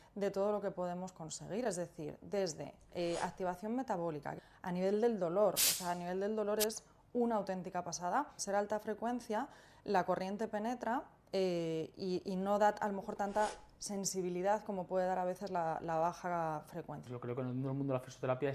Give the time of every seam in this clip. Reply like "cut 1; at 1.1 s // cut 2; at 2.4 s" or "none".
cut 1; at 4.3 s // cut 2; at 8.4 s // cut 3; at 17.1 s

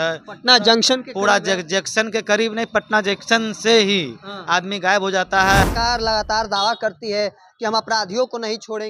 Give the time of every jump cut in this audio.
cut 1; at 5.6 s

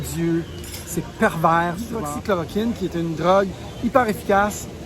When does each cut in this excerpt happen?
cut 1; at 2.0 s

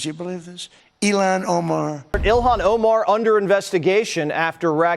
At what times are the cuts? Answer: cut 1; at 2.4 s

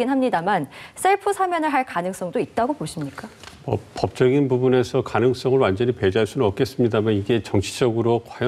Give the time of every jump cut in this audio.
none

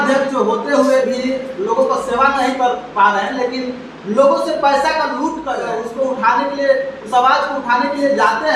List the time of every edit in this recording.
cut 1; at 5.5 s

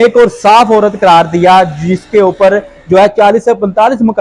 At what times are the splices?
none

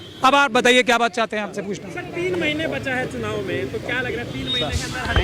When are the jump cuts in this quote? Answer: none

